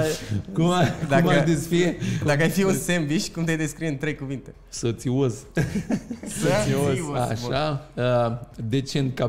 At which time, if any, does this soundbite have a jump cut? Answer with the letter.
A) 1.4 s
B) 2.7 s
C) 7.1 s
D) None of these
D